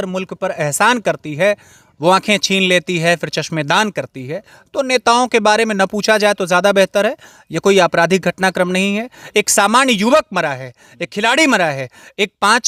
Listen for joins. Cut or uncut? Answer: uncut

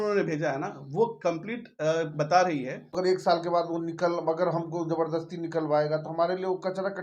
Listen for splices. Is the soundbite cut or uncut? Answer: cut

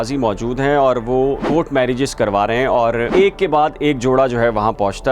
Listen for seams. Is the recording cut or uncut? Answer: cut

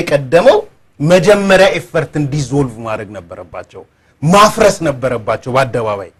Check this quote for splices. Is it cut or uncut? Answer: uncut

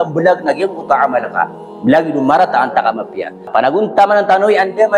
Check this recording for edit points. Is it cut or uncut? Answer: cut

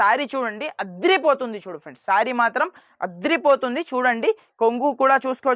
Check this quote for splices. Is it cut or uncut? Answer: uncut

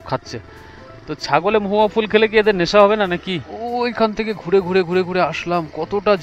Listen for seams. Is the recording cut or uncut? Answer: cut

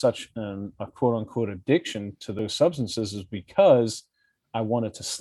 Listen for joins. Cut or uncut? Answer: cut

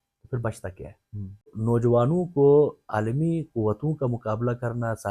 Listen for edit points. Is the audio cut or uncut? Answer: cut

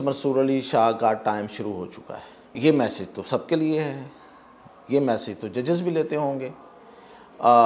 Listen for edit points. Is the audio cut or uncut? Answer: cut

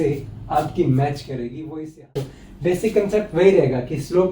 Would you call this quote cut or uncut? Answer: cut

